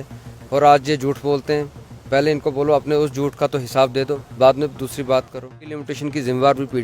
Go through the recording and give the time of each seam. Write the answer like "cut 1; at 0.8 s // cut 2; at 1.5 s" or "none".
cut 1; at 5.9 s